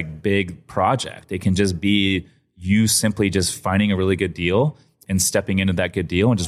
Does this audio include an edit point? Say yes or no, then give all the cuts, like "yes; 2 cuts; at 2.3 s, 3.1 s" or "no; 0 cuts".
no; 0 cuts